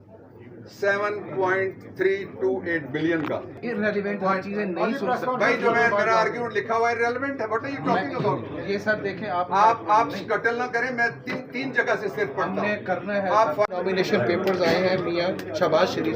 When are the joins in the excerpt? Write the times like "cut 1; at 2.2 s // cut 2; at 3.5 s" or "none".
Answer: cut 1; at 3.6 s // cut 2; at 13.7 s